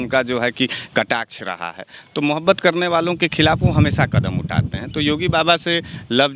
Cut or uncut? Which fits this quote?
uncut